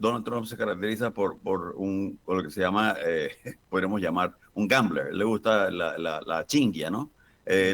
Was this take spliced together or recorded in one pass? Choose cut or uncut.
uncut